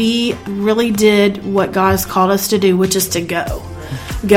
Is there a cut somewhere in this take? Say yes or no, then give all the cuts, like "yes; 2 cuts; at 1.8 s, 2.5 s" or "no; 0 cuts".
no; 0 cuts